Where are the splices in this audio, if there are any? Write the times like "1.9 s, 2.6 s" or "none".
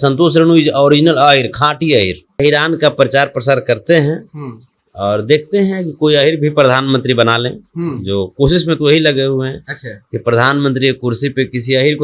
2.4 s